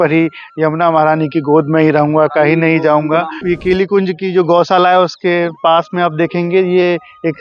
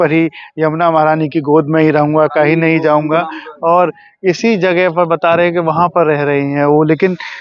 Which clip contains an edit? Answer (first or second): first